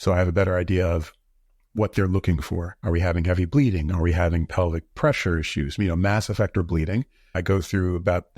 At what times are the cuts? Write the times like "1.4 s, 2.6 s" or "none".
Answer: 2.7 s